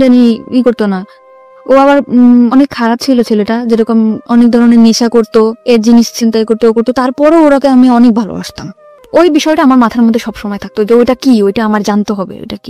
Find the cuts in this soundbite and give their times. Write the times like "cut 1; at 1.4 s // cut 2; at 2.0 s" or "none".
cut 1; at 9.0 s